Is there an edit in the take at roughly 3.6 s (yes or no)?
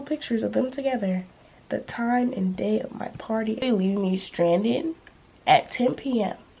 yes